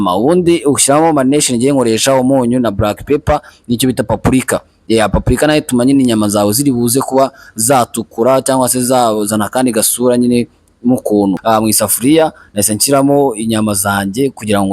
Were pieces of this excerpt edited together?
yes; 1 cut; at 11.4 s

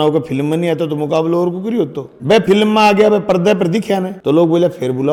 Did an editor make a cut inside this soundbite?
no; 0 cuts

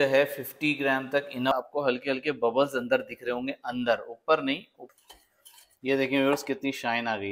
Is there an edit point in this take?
yes; 2 cuts; at 1.5 s, 4.8 s

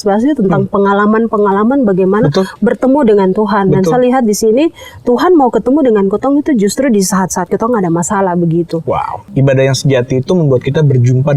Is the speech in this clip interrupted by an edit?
yes; 1 cut; at 9.2 s

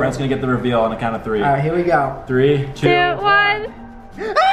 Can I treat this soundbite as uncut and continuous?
yes; 0 cuts

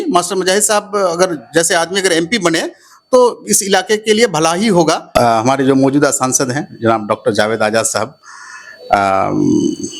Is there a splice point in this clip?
yes; 1 cut; at 5.1 s

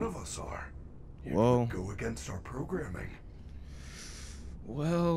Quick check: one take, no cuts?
yes; 0 cuts

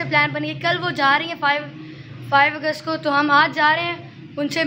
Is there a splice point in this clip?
no; 0 cuts

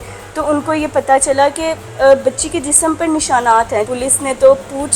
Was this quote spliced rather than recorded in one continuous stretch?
yes; 1 cut; at 3.9 s

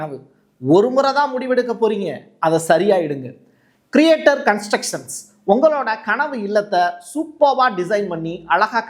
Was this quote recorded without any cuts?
yes; 0 cuts

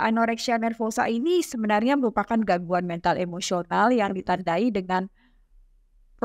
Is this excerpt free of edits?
yes; 0 cuts

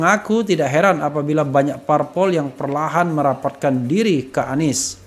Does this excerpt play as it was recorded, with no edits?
yes; 0 cuts

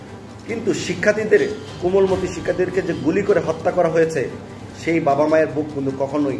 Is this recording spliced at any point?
no; 0 cuts

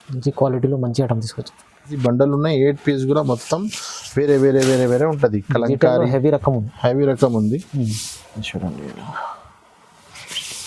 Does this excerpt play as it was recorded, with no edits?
no; 1 cut; at 1.9 s

